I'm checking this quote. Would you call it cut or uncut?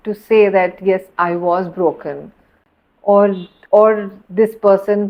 uncut